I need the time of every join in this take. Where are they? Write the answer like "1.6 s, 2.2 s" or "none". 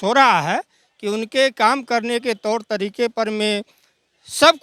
none

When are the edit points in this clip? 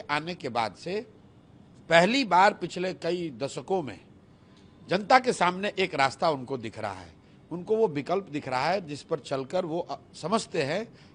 none

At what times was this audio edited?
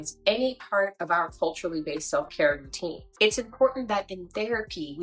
3.0 s

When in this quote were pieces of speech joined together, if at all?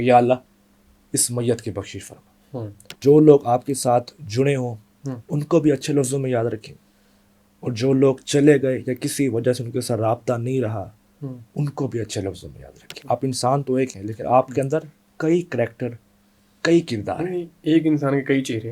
3.0 s, 13.0 s

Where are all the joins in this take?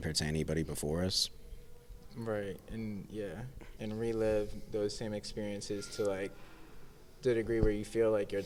none

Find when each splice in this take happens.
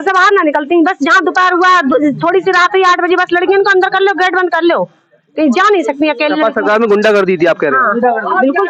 none

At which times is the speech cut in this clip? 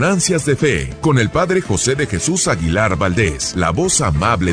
0.9 s, 3.4 s

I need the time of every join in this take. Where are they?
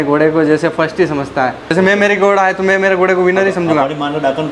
1.7 s

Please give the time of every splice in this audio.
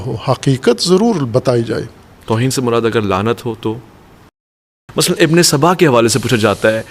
4.6 s

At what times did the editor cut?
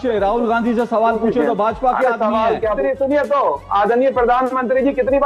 2.8 s

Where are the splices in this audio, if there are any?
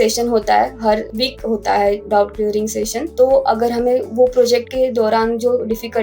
1.1 s, 3.0 s

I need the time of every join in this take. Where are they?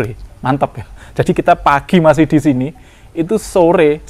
none

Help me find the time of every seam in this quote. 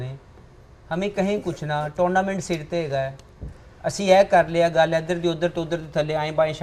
none

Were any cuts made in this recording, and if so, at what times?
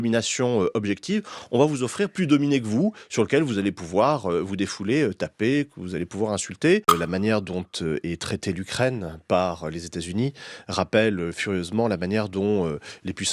6.9 s

